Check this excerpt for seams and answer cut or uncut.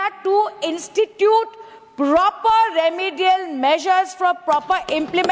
uncut